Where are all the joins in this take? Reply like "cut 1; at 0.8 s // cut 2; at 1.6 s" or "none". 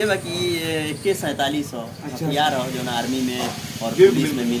none

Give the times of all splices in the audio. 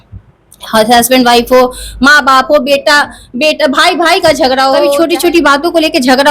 cut 1; at 4.9 s

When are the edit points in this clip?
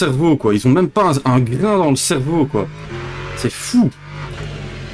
none

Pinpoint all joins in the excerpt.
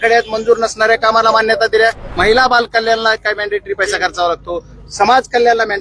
cut 1; at 2.0 s

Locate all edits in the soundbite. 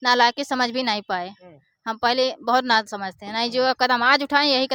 none

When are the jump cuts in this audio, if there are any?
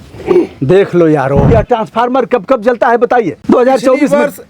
cut 1; at 1.4 s // cut 2; at 3.4 s

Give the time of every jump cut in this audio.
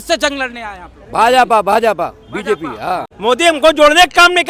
cut 1; at 3.1 s

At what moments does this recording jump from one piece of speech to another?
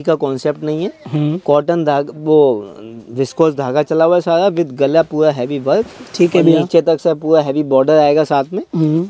none

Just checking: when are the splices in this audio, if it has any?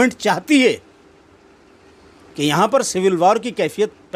none

